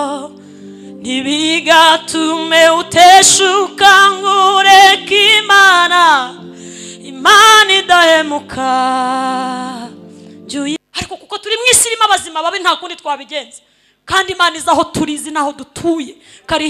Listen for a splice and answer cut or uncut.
cut